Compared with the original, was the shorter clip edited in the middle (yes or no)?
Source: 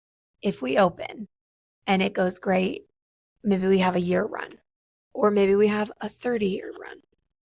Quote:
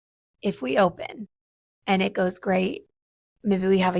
no